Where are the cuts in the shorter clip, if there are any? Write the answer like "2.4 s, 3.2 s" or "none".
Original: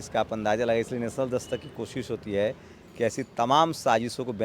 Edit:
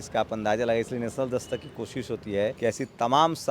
2.6 s